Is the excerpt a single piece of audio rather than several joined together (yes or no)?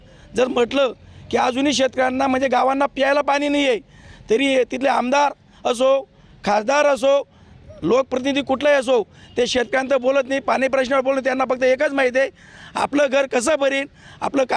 yes